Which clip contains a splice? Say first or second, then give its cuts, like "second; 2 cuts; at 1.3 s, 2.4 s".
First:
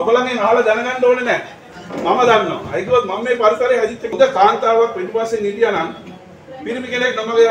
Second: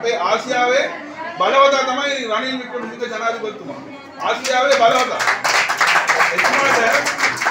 first; 1 cut; at 4.0 s